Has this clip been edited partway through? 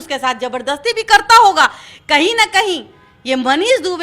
no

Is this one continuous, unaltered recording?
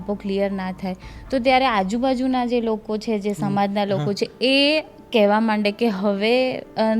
yes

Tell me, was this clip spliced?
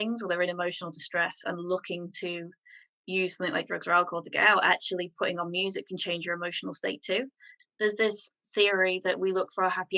yes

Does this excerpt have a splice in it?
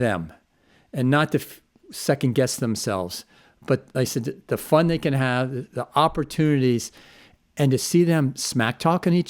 no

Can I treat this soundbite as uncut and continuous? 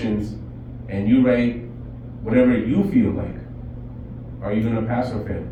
yes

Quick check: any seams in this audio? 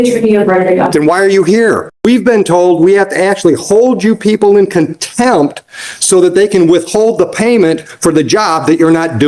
yes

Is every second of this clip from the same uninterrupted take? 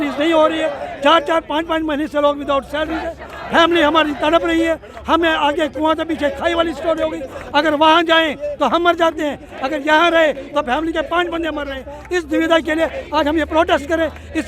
yes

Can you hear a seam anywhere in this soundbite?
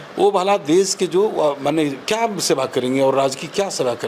no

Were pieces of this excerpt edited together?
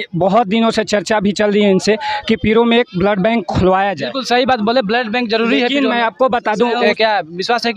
yes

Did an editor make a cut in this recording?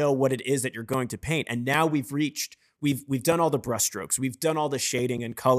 no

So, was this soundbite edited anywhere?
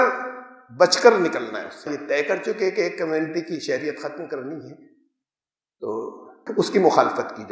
yes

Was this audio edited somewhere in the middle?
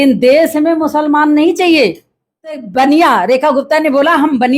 yes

